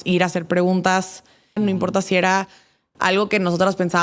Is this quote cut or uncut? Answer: cut